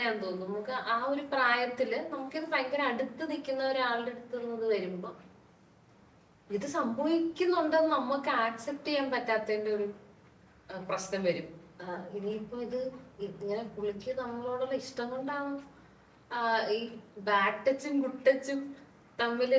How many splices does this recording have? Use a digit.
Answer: 0